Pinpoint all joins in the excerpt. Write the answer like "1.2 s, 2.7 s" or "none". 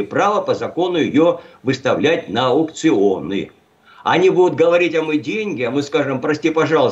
none